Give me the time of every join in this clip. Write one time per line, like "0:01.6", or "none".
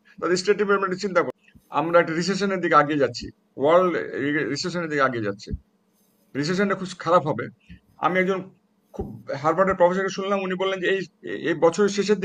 0:01.4